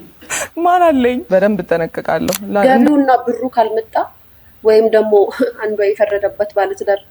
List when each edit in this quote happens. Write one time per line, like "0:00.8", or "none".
0:02.6